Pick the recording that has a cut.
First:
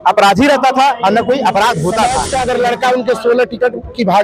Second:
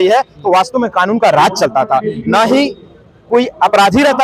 first; 1 cut; at 2.2 s

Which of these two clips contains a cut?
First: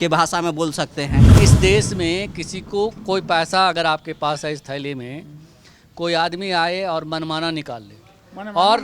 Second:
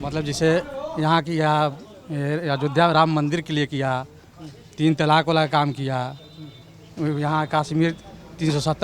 first; 1 cut; at 1.3 s

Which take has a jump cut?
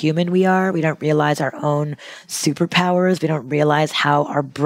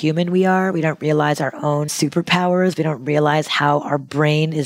second; 1 cut; at 1.9 s

